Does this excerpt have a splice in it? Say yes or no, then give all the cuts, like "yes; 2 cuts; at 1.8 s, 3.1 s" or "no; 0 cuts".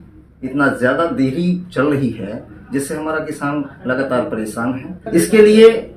yes; 1 cut; at 4.9 s